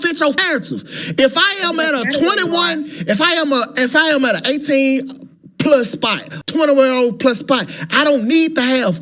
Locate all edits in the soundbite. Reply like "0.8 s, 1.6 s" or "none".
6.3 s